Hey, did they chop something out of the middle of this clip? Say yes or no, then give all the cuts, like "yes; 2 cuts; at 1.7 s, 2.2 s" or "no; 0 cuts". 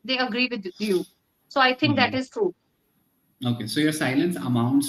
no; 0 cuts